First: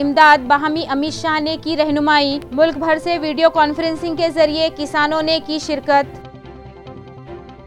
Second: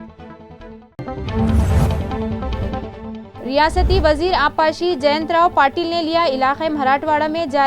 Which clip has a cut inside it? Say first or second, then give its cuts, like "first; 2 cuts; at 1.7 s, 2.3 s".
second; 1 cut; at 1.0 s